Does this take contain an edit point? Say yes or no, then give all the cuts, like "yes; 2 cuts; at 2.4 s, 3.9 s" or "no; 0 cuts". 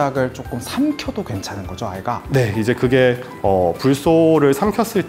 no; 0 cuts